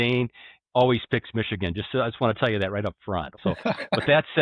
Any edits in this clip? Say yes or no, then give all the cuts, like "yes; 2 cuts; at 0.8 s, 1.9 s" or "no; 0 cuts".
yes; 1 cut; at 3.5 s